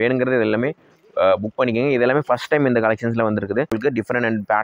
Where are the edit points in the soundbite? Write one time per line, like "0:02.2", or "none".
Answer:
0:03.7